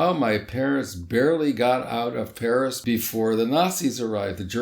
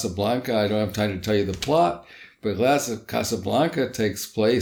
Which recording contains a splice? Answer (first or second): first